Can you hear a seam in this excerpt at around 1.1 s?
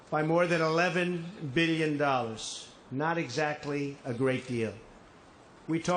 yes; 1 cut; at 1.1 s

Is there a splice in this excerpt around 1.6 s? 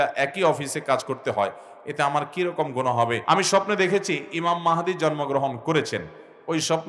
no; 1 cut; at 3.2 s

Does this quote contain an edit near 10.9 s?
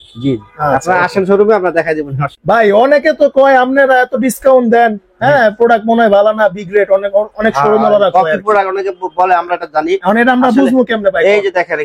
no; 1 cut; at 2.3 s

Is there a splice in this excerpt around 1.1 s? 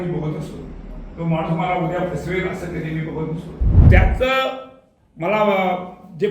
no; 1 cut; at 3.7 s

